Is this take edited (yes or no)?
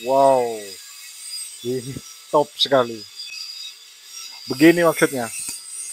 no